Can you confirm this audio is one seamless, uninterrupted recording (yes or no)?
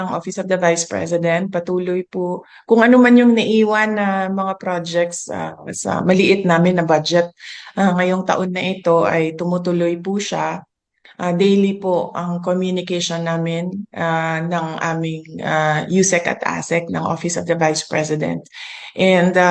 yes